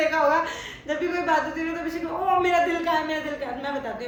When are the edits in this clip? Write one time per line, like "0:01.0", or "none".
none